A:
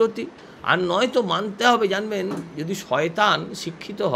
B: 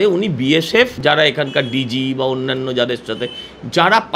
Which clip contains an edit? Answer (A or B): B